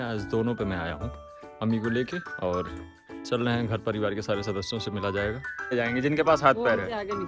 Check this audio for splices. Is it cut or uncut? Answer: cut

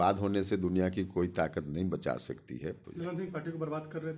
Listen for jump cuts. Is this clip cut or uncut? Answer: cut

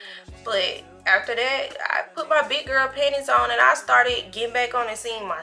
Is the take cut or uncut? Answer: uncut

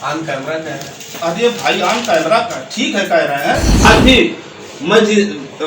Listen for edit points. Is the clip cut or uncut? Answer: cut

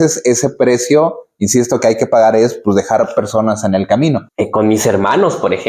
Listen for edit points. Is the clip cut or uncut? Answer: cut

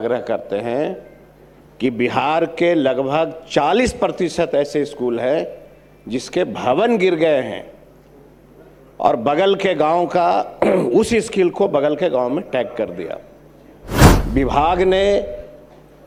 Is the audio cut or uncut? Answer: uncut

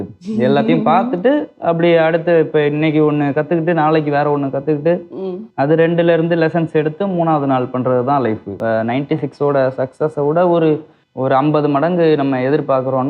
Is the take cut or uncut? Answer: cut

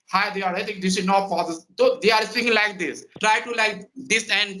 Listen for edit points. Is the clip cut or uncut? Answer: uncut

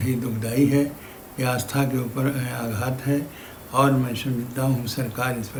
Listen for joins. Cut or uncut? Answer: uncut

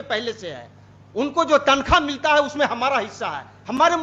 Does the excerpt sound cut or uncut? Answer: uncut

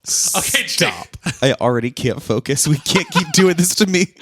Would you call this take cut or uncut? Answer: cut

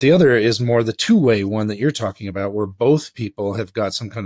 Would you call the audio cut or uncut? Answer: uncut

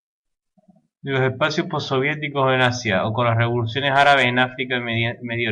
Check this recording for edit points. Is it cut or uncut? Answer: cut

